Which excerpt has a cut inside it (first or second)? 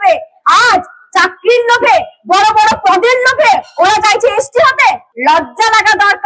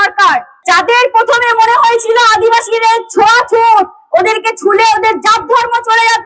first